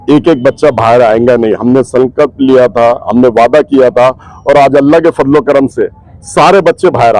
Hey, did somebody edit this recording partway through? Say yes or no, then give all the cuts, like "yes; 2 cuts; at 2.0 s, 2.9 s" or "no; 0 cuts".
no; 0 cuts